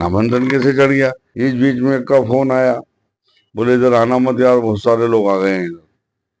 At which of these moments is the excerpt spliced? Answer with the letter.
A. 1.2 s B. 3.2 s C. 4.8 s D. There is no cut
A